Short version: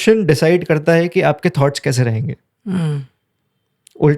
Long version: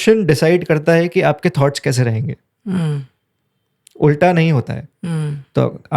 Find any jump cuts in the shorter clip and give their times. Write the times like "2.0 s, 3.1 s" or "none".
none